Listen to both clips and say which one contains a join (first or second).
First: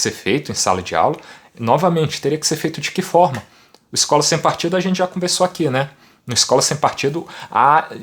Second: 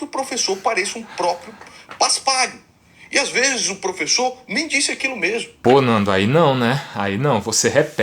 second